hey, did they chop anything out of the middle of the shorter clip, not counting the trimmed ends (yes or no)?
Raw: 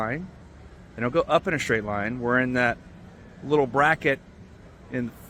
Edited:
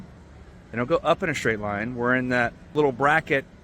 yes